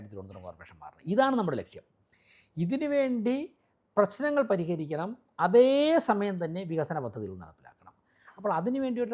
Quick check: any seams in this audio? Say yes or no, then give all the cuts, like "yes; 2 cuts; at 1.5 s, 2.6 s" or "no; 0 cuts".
no; 0 cuts